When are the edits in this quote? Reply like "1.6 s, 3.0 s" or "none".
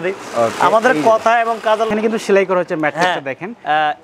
1.9 s